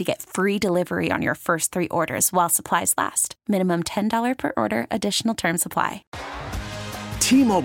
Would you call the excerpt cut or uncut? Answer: cut